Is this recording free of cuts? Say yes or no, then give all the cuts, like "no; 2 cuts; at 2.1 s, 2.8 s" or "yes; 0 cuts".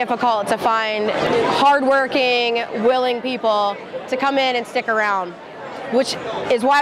no; 1 cut; at 1.3 s